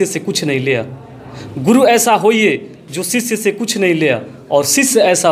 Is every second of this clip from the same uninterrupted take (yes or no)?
yes